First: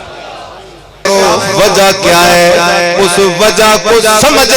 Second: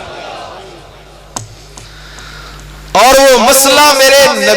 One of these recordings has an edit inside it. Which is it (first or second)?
first